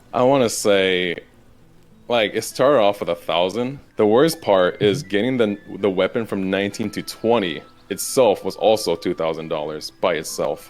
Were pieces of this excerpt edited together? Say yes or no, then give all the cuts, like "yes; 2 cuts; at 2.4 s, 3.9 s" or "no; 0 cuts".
yes; 1 cut; at 3.8 s